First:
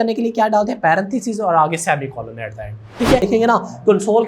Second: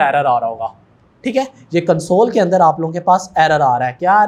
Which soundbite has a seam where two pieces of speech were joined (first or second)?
first